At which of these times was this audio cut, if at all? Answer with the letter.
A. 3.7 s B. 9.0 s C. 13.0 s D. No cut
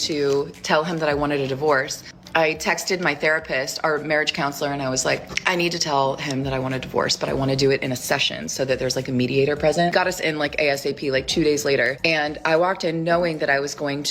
A